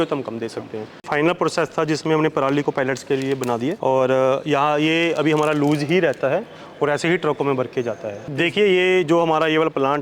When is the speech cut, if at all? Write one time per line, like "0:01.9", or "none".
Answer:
0:01.0
0:08.3